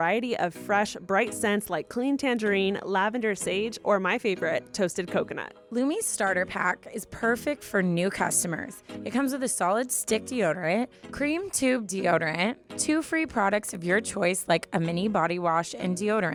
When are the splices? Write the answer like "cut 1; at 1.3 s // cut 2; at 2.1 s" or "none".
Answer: none